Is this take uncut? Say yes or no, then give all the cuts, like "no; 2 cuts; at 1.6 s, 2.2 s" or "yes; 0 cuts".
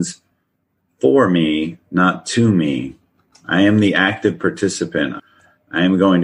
no; 1 cut; at 5.2 s